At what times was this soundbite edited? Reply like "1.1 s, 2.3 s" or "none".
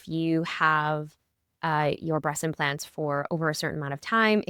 none